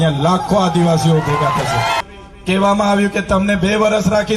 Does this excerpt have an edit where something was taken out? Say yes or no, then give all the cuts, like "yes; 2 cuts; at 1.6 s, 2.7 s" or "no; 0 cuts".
yes; 1 cut; at 2.0 s